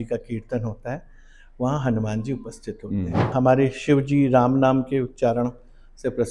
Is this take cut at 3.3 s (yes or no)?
yes